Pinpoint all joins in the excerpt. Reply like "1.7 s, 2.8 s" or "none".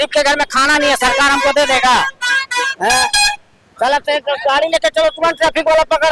none